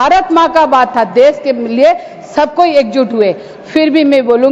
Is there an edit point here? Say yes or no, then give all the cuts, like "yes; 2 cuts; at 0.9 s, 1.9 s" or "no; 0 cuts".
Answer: no; 0 cuts